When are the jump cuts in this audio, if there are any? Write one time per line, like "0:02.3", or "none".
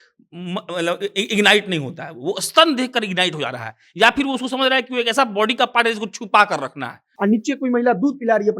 0:07.0